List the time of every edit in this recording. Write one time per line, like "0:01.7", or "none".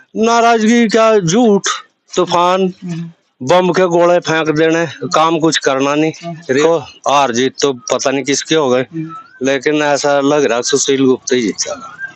0:06.6